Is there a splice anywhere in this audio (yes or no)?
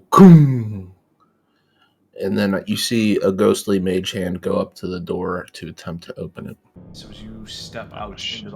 yes